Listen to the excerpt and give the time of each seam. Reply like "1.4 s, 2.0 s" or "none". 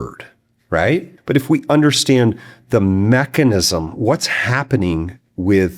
1.1 s